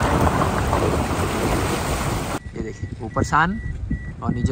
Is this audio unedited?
no; 1 cut; at 2.4 s

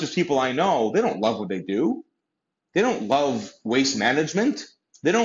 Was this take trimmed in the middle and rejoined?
no; 0 cuts

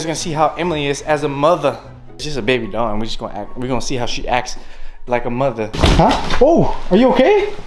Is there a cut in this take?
yes; 2 cuts; at 2.3 s, 5.7 s

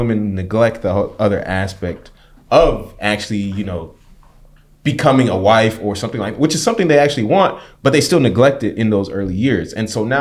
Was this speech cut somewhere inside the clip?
no; 0 cuts

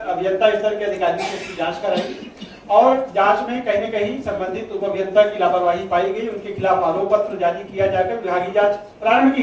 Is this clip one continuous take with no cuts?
yes; 0 cuts

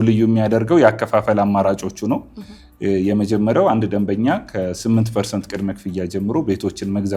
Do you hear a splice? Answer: no; 0 cuts

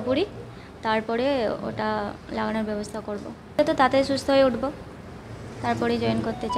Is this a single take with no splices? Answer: no; 1 cut; at 3.6 s

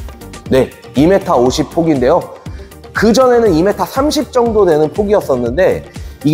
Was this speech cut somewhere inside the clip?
no; 0 cuts

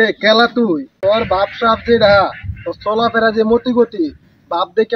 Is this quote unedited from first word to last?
no; 1 cut; at 0.9 s

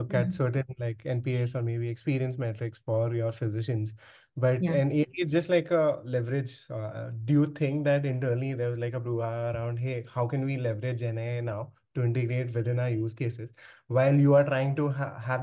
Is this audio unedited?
yes; 0 cuts

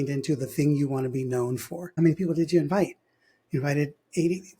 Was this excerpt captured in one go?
no; 1 cut; at 1.9 s

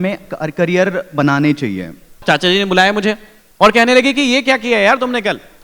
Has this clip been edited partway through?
yes; 1 cut; at 2.2 s

